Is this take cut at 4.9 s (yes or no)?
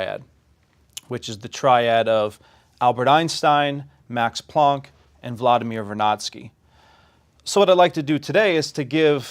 no